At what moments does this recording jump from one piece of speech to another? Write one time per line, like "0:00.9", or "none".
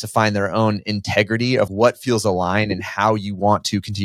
0:01.7